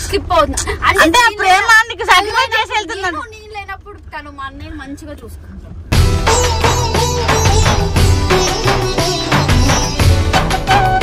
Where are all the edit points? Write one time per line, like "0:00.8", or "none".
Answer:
none